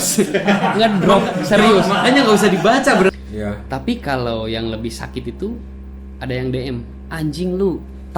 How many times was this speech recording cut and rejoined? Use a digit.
1